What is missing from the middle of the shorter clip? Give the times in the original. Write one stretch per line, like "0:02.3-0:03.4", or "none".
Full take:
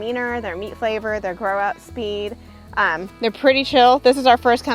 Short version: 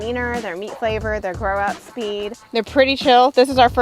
0:02.4-0:03.1